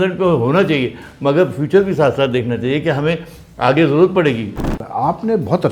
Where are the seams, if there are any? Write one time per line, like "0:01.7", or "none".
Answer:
0:04.6